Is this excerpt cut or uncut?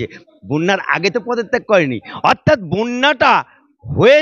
uncut